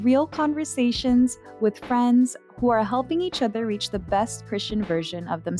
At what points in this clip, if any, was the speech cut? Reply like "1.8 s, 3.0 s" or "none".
none